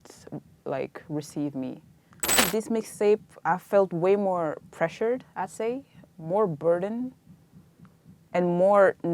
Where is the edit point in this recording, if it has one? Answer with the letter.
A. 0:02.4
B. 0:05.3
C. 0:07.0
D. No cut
A